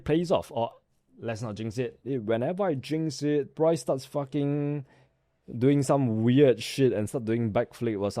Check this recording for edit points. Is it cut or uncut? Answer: cut